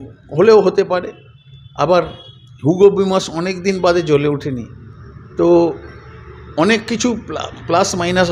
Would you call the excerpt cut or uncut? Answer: uncut